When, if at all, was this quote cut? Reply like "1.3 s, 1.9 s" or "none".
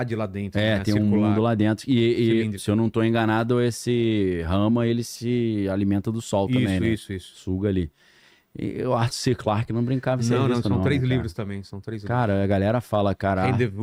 none